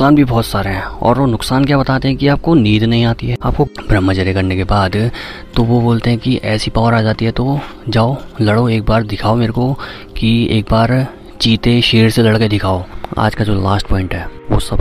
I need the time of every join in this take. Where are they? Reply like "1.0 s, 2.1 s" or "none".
3.7 s, 13.0 s